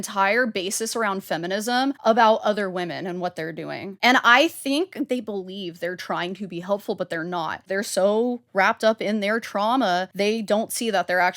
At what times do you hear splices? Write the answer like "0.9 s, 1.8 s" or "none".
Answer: 2.0 s, 3.9 s, 5.1 s, 7.7 s, 10.1 s